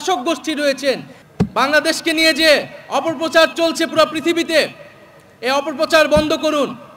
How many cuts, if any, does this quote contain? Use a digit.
1